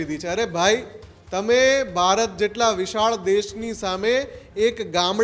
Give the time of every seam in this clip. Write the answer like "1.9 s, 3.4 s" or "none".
none